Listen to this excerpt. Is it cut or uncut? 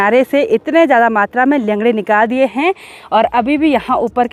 uncut